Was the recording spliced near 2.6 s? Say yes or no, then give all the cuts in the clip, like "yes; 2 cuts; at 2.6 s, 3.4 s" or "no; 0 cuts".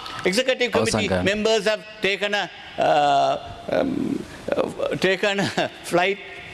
no; 0 cuts